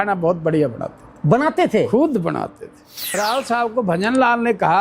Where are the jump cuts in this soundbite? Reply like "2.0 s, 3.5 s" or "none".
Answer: 3.2 s